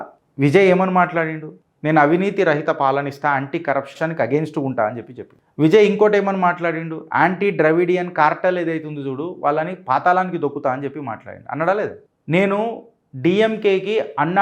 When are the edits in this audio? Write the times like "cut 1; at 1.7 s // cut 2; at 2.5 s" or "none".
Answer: cut 1; at 3.9 s